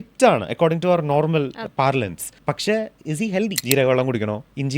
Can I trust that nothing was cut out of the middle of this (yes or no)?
no